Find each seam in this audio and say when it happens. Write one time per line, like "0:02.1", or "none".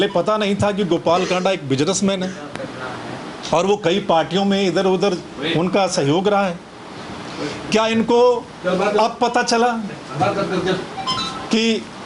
none